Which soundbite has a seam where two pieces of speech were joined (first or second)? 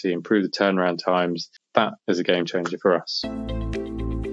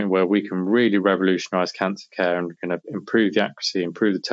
first